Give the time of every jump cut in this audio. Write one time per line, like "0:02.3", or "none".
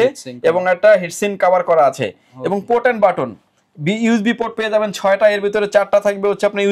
none